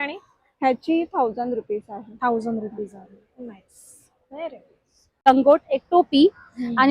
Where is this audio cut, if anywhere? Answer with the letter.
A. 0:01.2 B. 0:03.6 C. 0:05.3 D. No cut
C